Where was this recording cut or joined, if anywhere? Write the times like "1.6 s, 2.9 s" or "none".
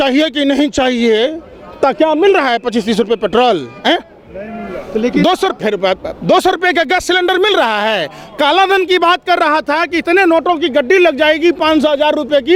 none